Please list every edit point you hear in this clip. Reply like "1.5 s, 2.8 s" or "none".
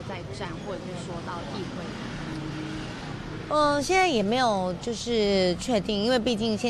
none

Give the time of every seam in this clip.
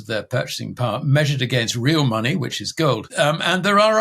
3.1 s

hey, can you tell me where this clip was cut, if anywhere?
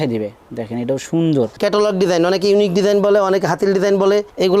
1.5 s

